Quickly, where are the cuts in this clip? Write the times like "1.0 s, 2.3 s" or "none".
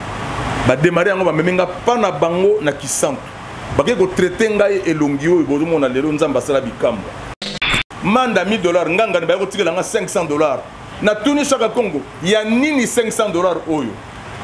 7.6 s